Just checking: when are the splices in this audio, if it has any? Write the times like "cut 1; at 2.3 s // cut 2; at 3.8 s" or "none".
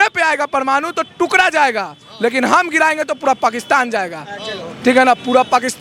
none